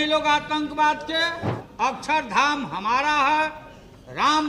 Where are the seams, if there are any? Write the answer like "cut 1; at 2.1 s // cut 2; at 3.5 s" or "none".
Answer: cut 1; at 1.6 s